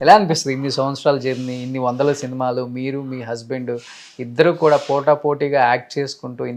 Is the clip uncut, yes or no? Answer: yes